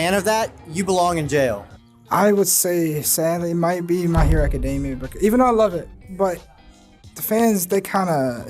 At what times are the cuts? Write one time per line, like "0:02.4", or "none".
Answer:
none

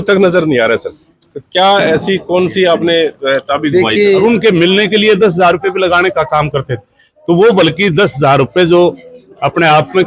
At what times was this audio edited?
0:04.2

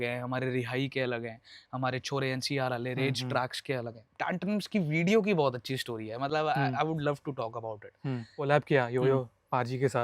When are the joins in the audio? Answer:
0:04.1
0:08.5

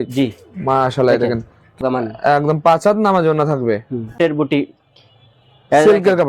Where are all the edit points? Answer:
0:01.8
0:04.2

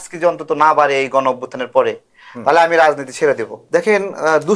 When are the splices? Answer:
0:03.6

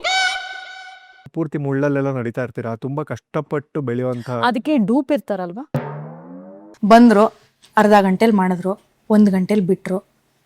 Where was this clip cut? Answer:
0:01.3
0:06.6

